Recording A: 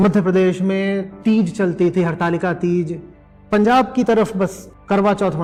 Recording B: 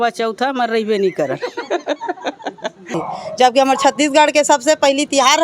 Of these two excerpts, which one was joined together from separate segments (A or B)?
B